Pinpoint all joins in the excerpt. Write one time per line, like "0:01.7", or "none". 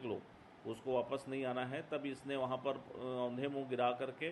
none